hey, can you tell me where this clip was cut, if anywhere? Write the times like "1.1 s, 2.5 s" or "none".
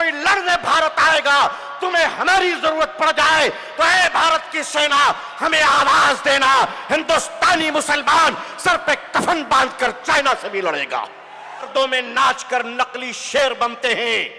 11.7 s